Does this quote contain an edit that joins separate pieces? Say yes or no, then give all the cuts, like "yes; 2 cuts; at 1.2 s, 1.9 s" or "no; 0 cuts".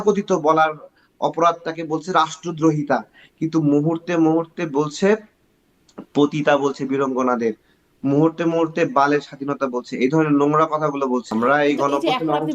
yes; 1 cut; at 11.3 s